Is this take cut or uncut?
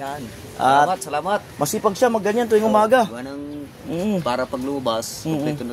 uncut